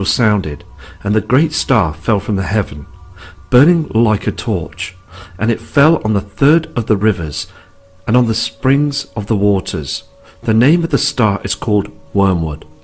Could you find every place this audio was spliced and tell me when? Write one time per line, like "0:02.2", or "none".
none